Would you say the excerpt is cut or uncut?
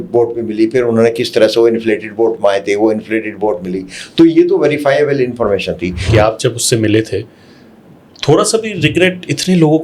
cut